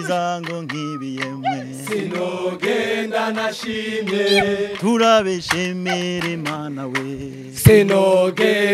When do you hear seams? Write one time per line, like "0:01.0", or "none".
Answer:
none